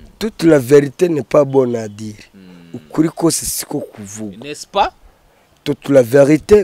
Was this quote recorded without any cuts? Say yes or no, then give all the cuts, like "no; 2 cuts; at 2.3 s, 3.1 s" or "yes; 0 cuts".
yes; 0 cuts